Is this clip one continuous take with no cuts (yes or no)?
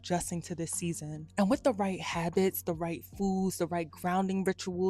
yes